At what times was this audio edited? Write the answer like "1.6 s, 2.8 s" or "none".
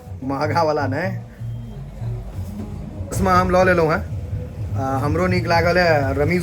3.1 s